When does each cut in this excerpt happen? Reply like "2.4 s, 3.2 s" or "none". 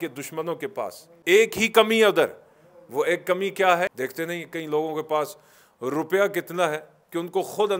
1.1 s, 3.9 s